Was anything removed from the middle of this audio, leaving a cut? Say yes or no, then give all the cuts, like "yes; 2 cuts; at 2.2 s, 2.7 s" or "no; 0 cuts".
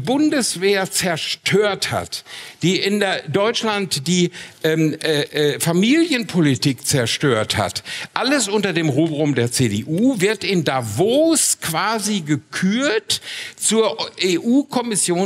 no; 0 cuts